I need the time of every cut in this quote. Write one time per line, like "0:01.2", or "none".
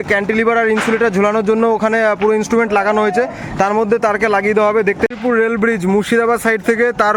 0:05.1

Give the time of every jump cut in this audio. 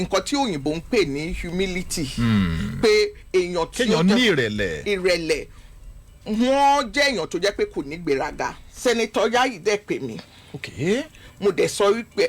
0:08.7

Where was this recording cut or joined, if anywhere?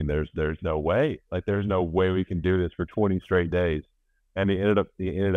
none

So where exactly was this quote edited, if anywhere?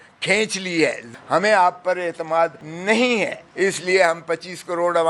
0:01.0
0:02.7
0:03.4

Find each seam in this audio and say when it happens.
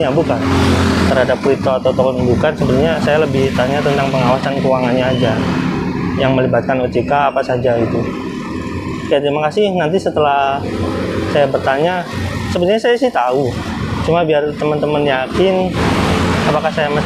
none

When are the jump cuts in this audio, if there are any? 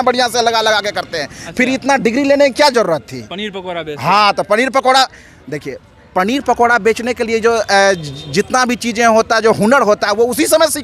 none

